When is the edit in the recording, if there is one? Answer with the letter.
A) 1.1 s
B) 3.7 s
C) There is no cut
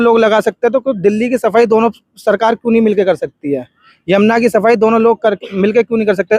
C